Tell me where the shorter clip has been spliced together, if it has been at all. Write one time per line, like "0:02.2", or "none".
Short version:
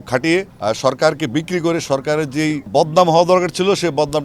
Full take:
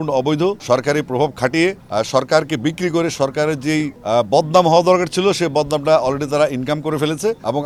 0:02.7